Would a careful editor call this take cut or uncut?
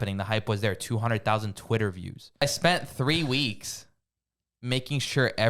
cut